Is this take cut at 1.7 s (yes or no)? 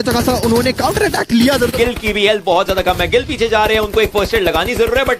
yes